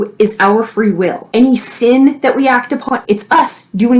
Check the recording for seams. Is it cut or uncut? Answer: cut